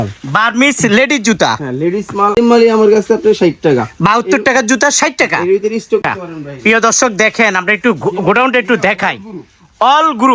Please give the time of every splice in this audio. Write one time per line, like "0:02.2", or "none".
0:02.4
0:06.0

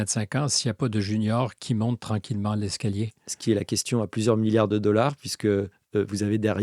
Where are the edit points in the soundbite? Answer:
none

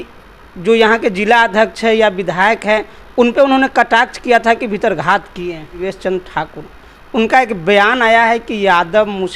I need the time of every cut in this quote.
0:05.8

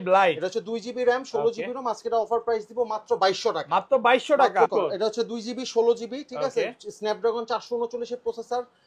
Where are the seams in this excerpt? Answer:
0:04.7

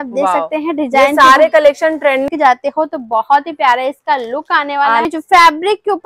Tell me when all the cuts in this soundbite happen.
0:02.3
0:05.1

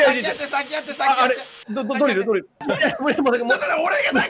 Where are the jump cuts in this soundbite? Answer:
0:02.6

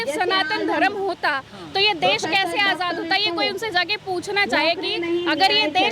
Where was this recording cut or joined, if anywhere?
none

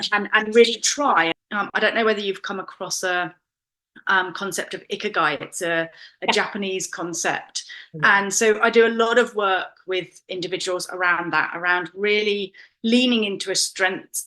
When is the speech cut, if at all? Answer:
0:01.4

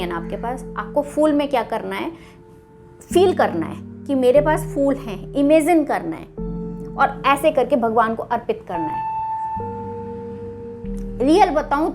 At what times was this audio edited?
0:08.8
0:11.1

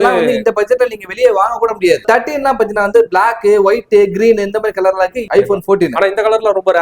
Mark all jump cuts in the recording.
0:02.0
0:05.2

